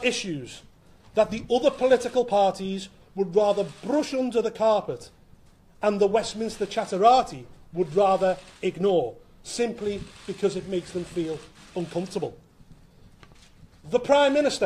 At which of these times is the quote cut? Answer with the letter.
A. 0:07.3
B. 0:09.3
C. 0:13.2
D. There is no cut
D